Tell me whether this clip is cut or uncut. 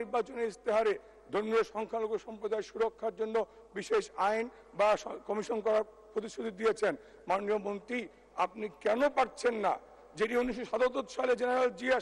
uncut